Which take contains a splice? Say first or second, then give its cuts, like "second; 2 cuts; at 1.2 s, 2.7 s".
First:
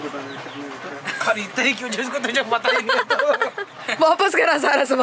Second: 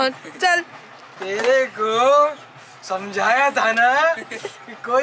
first; 1 cut; at 3.7 s